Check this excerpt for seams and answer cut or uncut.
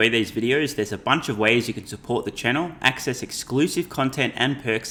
uncut